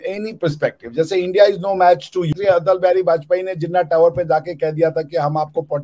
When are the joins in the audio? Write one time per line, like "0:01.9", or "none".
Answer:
0:02.3